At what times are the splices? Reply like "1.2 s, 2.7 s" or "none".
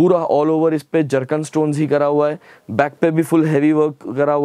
none